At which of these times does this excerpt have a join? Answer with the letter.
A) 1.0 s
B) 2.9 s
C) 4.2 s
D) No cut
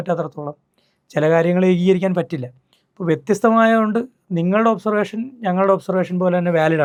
D